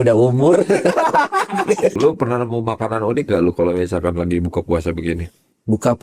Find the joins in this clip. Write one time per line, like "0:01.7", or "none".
0:01.9

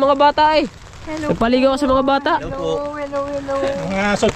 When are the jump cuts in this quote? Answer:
none

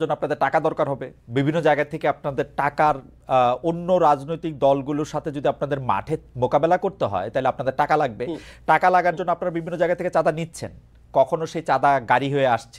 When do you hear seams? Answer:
none

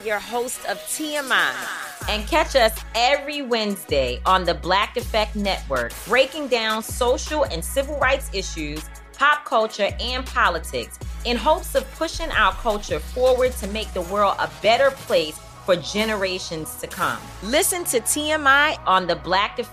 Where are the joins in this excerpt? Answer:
none

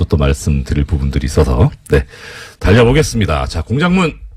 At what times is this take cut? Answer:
0:02.3

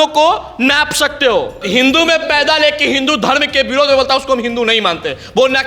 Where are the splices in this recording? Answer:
0:01.6

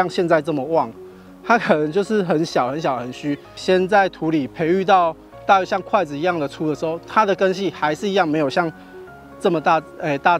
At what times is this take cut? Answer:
none

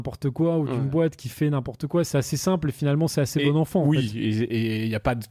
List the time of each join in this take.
none

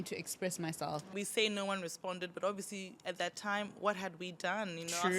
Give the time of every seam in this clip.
0:01.1

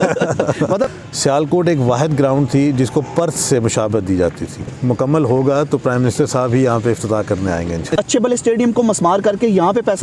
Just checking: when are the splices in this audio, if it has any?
0:01.0
0:04.7
0:07.9

